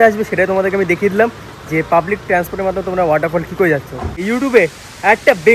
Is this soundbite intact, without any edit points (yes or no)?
no